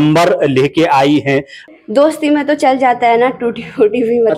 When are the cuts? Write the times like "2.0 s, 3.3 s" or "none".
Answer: 1.6 s